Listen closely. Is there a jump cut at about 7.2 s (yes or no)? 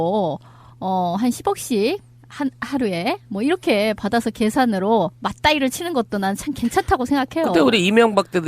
no